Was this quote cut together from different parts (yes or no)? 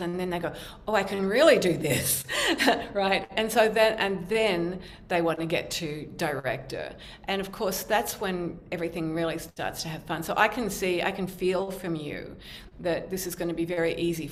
no